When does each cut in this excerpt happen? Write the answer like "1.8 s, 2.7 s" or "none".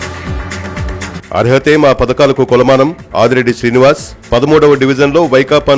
none